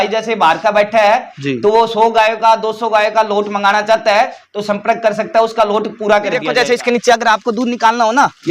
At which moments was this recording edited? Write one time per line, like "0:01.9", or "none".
0:06.4